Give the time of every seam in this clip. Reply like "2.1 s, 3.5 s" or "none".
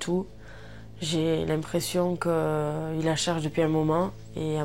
none